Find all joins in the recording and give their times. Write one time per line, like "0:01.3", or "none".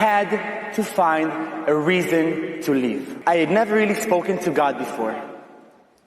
0:03.1